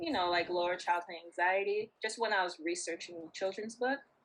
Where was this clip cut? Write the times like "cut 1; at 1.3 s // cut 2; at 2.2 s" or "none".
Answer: cut 1; at 2.0 s